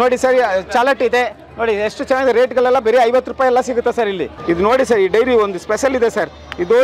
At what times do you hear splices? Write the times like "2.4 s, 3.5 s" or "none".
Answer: 4.3 s